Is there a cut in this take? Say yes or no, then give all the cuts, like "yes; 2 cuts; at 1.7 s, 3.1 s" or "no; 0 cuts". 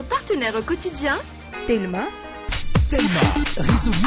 yes; 1 cut; at 1.3 s